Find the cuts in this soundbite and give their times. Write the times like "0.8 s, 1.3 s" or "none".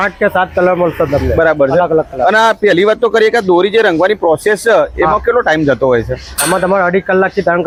none